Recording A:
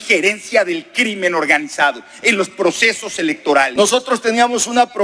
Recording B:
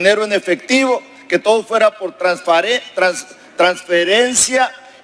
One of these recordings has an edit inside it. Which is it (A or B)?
A